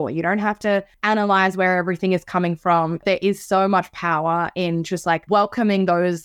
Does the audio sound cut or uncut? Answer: cut